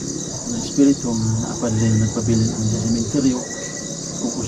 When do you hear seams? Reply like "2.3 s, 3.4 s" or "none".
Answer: none